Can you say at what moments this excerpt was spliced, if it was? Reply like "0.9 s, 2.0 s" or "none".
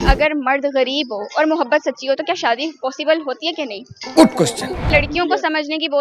4.9 s